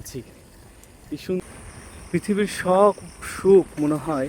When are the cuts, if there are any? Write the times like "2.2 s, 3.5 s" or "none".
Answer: 1.4 s